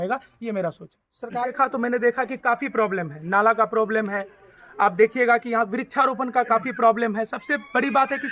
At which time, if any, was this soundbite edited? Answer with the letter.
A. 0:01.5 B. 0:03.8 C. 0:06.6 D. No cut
A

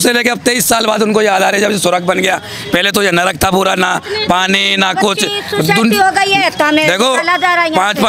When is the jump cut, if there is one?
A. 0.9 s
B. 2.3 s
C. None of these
C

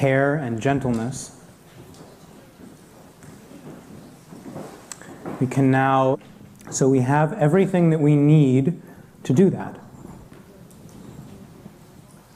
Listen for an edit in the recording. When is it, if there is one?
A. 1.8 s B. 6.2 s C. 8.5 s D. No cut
D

